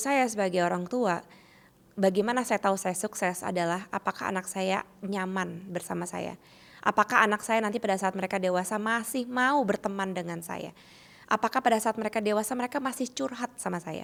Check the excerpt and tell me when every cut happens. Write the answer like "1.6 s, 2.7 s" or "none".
none